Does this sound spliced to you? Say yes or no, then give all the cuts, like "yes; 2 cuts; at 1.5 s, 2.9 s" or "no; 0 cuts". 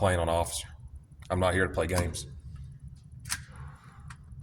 no; 0 cuts